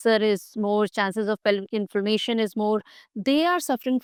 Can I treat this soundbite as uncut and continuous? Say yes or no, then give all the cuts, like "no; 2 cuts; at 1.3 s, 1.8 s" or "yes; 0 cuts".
yes; 0 cuts